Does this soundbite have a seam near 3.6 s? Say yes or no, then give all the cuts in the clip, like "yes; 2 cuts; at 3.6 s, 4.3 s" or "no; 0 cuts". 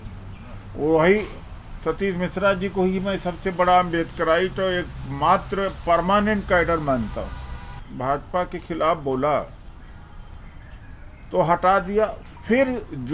no; 1 cut; at 7.8 s